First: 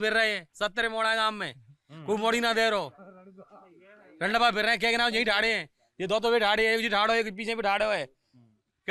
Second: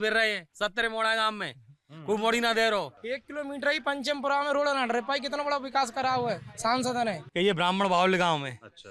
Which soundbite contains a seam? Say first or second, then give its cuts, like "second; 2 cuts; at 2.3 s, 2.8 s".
second; 2 cuts; at 3.0 s, 7.2 s